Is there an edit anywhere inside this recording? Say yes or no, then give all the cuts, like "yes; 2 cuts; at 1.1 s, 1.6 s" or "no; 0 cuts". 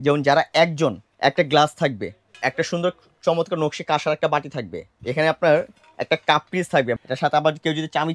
yes; 4 cuts; at 1.1 s, 2.3 s, 4.9 s, 7.0 s